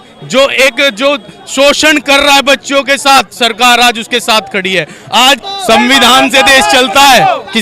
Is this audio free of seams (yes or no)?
no